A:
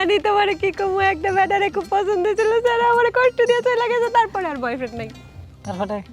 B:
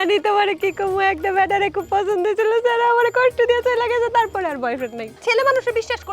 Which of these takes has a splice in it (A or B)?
B